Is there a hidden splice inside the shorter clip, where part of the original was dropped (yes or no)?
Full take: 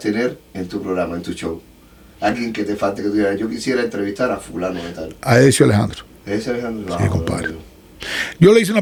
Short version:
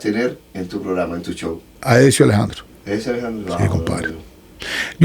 yes